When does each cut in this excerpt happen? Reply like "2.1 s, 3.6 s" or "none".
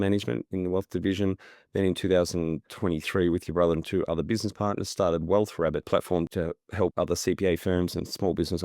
6.4 s